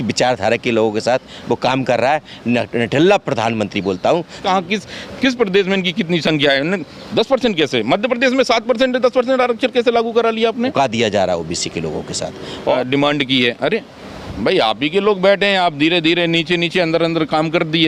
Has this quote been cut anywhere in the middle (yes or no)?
yes